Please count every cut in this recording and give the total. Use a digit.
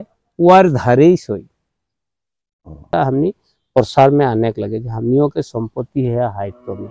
1